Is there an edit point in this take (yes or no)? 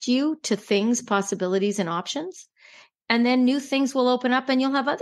yes